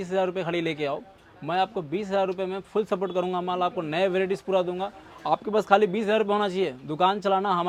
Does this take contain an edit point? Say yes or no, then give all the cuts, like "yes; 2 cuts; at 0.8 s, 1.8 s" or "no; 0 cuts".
no; 0 cuts